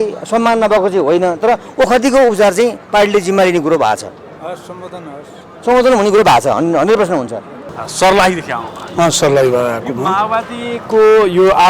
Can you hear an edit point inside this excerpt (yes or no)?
no